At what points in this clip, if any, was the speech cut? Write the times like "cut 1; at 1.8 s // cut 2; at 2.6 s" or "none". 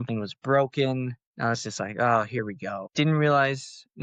cut 1; at 1.2 s // cut 2; at 2.8 s